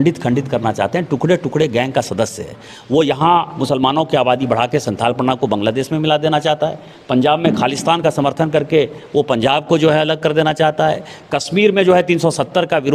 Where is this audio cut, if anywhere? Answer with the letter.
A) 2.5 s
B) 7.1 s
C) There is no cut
C